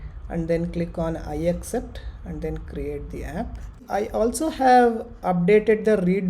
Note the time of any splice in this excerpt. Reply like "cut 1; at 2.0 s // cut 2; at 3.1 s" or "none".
cut 1; at 3.8 s